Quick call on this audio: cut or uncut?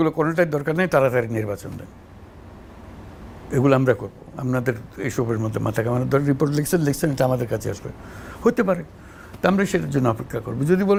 uncut